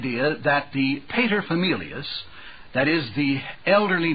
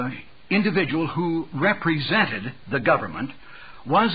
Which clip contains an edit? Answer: second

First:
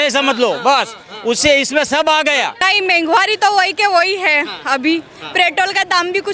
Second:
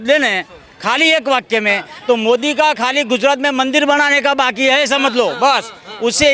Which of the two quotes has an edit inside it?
first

